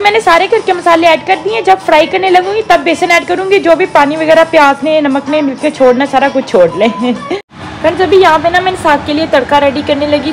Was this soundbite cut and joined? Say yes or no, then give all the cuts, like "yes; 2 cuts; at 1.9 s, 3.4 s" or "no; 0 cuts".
no; 0 cuts